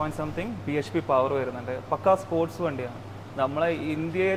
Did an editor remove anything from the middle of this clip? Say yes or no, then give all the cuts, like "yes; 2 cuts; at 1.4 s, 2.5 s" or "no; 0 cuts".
no; 0 cuts